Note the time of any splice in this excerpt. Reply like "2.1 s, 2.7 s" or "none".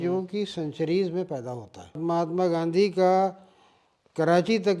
2.0 s